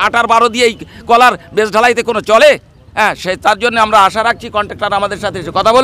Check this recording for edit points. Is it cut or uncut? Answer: uncut